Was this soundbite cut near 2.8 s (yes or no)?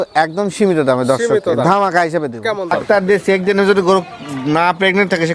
yes